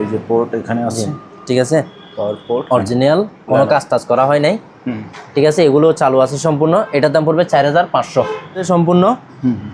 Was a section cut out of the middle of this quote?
yes; 1 cut; at 8.7 s

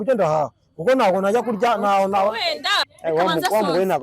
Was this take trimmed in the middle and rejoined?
yes; 1 cut; at 2.8 s

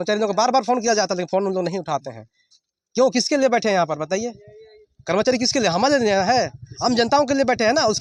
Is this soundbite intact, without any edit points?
yes; 0 cuts

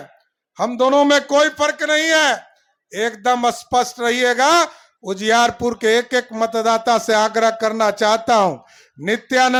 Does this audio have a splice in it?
no; 0 cuts

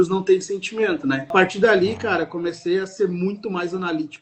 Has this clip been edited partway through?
yes; 1 cut; at 1.3 s

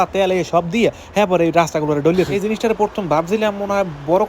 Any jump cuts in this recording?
yes; 1 cut; at 2.4 s

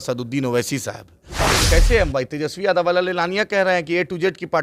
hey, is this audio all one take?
no; 1 cut; at 1.5 s

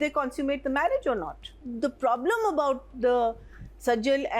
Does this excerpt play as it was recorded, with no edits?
no; 1 cut; at 1.6 s

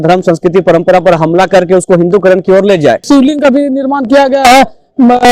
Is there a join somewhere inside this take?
yes; 1 cut; at 3.0 s

